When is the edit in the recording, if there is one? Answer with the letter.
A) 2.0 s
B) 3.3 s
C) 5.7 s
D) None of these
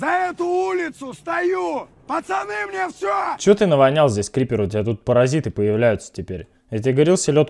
B